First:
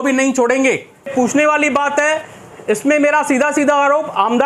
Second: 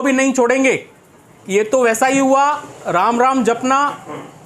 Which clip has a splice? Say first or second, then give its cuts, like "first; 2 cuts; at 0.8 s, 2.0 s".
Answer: first; 1 cut; at 1.1 s